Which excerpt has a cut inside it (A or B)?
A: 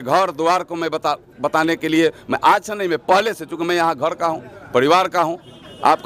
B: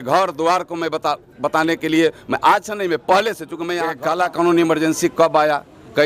B